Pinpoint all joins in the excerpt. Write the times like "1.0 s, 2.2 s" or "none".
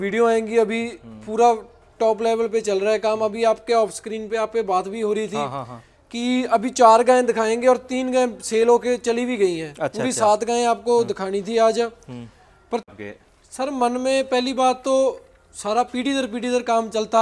12.9 s